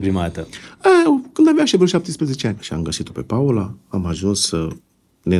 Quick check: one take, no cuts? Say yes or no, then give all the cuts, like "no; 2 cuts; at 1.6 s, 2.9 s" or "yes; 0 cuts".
no; 1 cut; at 2.5 s